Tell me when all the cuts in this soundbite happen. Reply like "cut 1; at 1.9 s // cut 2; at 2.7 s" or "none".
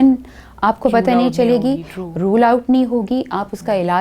none

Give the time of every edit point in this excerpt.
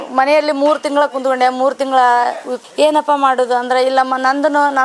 cut 1; at 2.5 s

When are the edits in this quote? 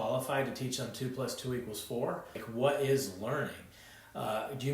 cut 1; at 2.4 s

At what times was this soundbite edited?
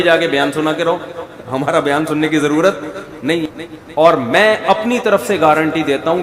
cut 1; at 3.5 s

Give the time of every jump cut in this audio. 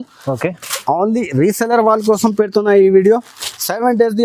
none

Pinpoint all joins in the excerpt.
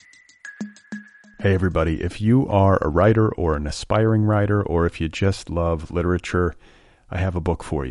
cut 1; at 0.9 s

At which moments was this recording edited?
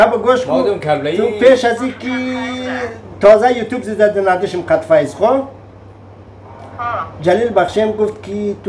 none

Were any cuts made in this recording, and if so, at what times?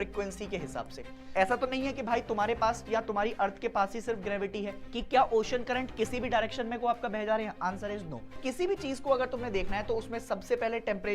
cut 1; at 1.1 s // cut 2; at 4.8 s // cut 3; at 8.4 s

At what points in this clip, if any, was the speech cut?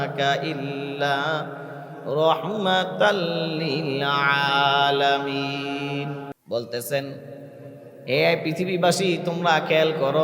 cut 1; at 6.3 s

